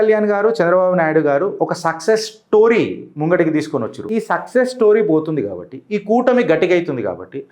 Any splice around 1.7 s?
no; 1 cut; at 4.0 s

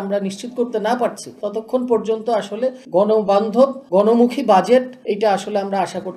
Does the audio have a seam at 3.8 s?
yes; 4 cuts; at 1.3 s, 2.8 s, 3.8 s, 4.9 s

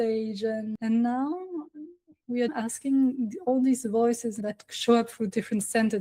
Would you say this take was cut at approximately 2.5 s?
yes; 2 cuts; at 2.5 s, 4.4 s

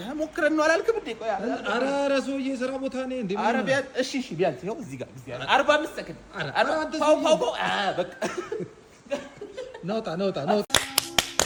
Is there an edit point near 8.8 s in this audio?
no; 0 cuts

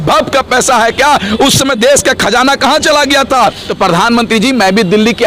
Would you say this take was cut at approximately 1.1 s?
no; 1 cut; at 3.6 s

